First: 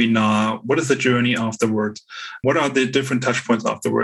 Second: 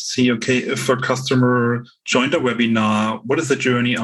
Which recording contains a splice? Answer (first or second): first